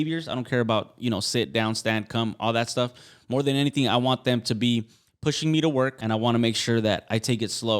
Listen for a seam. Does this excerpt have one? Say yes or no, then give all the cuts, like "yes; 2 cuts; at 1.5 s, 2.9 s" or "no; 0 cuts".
yes; 1 cut; at 6.0 s